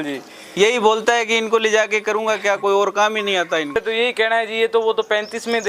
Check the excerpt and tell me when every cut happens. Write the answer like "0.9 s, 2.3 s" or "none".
3.7 s